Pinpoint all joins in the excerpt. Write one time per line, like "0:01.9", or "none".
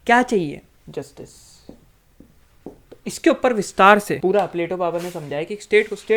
0:02.4
0:04.1